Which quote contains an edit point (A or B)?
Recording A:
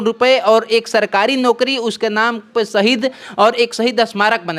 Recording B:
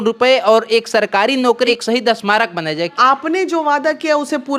B